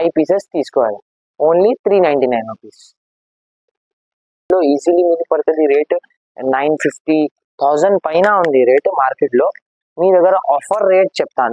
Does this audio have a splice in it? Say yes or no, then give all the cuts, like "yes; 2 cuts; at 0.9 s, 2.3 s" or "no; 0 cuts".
yes; 1 cut; at 4.5 s